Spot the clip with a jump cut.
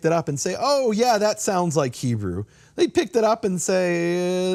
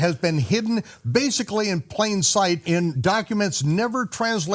second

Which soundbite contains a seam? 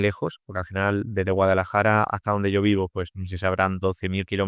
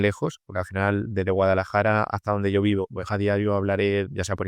second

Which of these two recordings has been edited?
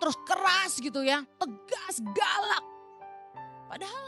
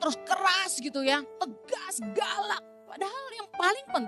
second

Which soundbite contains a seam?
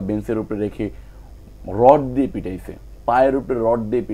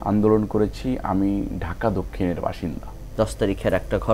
second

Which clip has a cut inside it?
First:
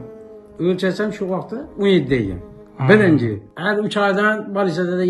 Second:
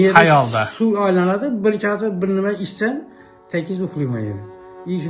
first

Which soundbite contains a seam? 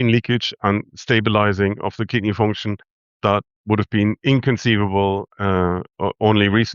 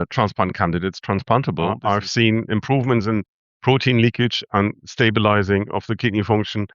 second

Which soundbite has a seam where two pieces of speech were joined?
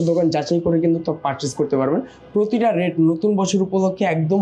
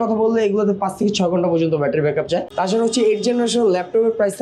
second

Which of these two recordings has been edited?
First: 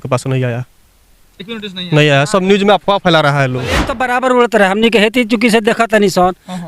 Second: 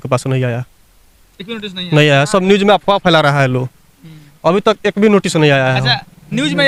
first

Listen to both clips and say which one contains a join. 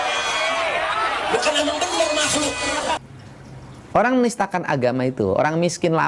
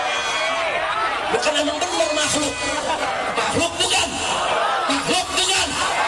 first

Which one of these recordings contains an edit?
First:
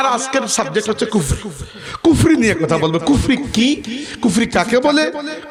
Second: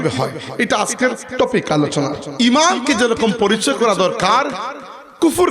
second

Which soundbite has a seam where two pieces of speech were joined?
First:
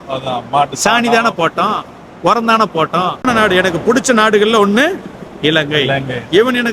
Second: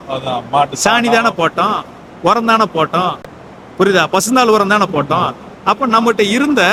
first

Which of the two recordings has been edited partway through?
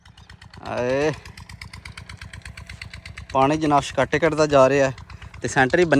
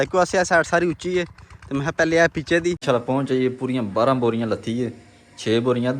second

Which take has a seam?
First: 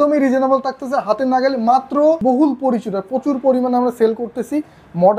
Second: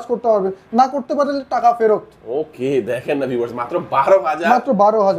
first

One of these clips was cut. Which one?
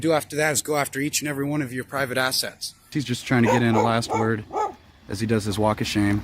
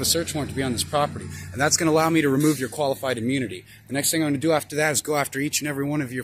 first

